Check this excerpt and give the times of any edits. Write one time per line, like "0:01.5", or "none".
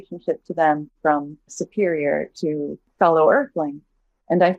0:01.6
0:02.8